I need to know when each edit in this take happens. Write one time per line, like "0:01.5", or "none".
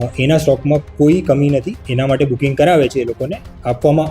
0:01.8